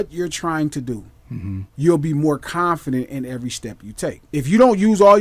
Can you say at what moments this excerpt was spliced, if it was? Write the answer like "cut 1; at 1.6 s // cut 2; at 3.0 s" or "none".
none